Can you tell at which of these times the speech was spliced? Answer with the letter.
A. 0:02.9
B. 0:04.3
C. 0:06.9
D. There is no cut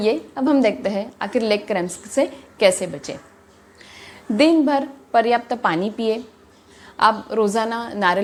D